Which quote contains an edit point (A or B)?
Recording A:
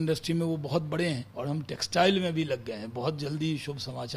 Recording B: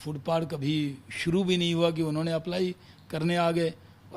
A